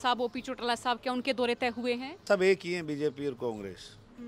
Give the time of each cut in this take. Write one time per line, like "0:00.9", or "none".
0:02.2